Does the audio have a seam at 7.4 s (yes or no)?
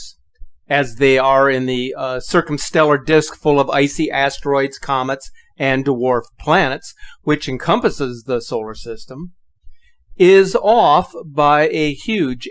no